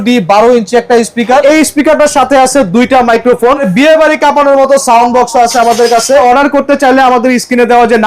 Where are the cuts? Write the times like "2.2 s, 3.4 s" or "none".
1.4 s, 3.7 s, 6.2 s